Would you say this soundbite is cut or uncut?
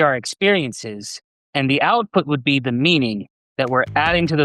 uncut